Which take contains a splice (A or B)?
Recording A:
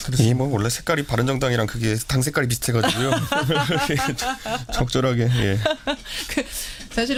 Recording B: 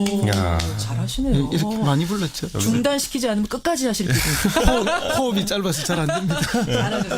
B